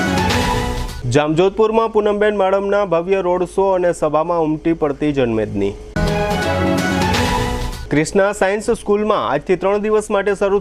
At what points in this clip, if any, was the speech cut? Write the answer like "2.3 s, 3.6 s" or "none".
0.9 s